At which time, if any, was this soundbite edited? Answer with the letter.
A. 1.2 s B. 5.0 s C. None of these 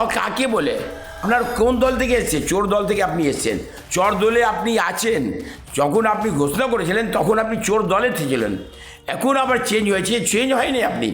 A